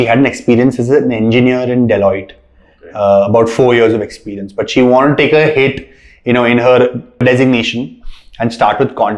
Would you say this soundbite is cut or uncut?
cut